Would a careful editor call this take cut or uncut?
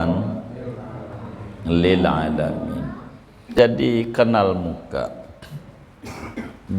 cut